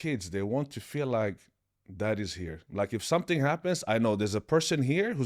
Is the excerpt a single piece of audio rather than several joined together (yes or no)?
no